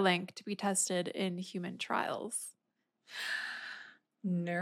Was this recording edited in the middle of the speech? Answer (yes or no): no